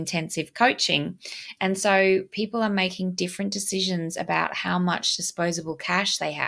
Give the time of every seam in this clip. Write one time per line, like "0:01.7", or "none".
none